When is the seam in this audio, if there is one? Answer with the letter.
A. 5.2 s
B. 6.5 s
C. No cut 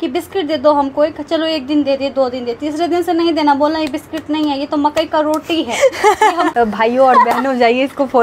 B